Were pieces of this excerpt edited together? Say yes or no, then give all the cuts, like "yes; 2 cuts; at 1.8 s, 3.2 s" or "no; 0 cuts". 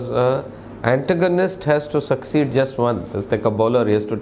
no; 0 cuts